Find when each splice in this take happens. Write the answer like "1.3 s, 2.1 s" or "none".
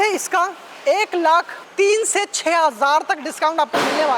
1.6 s